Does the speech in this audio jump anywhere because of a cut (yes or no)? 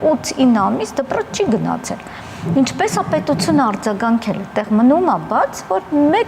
no